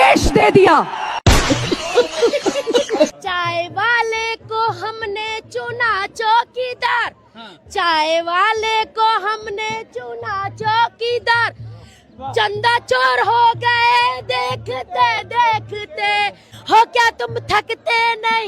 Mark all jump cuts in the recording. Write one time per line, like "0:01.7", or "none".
0:03.1